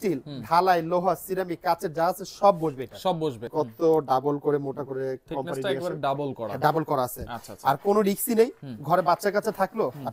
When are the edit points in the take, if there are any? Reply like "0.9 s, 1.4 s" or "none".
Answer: 3.5 s

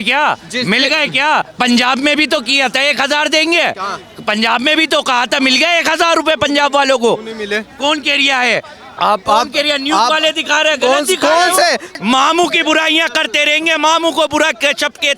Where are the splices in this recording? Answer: 11.9 s

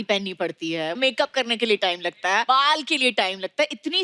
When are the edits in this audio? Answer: 1.0 s, 2.4 s

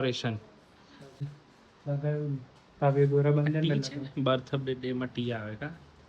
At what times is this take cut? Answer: 1.3 s

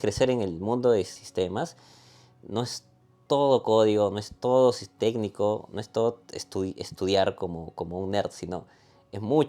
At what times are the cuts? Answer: 1.2 s

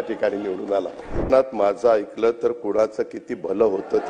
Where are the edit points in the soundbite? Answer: 1.3 s

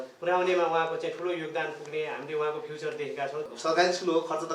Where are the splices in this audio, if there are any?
3.5 s

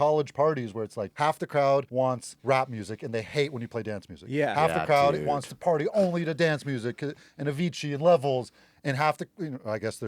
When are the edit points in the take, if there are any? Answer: 1.0 s, 2.0 s

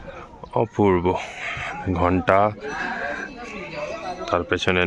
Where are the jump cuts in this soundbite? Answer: none

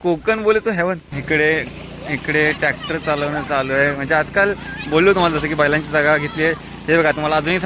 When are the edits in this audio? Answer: 1.1 s

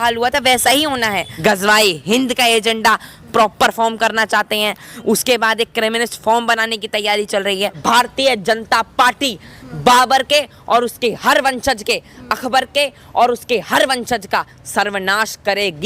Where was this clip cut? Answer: 1.3 s, 7.8 s

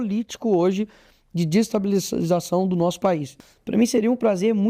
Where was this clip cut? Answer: 3.3 s

